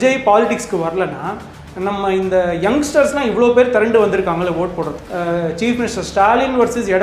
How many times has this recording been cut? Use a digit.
1